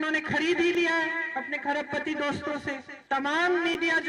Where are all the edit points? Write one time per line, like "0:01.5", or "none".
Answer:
0:02.9